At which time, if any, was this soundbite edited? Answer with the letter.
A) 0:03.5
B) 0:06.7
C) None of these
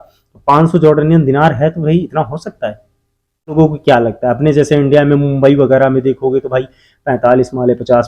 A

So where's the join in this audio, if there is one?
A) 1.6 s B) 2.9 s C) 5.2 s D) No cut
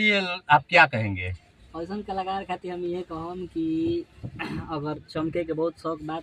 D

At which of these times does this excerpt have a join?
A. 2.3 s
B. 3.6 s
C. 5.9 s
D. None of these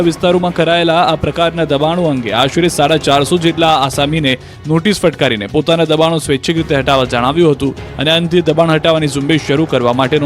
A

